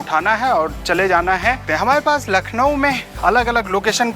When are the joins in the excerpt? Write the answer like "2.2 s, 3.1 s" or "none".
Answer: 1.7 s